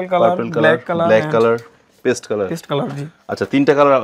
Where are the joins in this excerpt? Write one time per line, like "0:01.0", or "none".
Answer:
none